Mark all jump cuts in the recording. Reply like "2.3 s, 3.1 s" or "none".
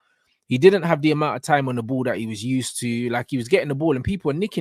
none